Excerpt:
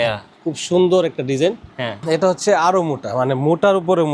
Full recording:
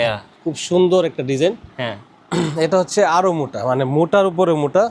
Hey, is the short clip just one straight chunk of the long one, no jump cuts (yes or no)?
no